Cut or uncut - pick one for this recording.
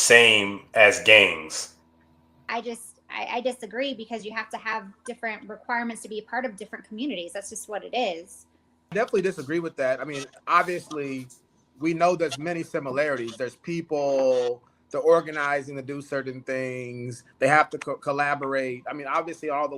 cut